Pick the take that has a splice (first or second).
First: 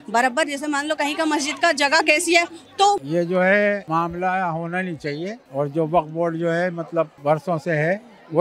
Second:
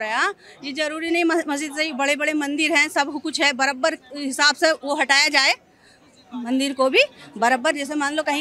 first